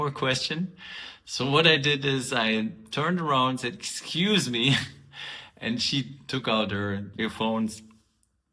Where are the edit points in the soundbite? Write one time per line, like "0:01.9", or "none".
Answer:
0:07.2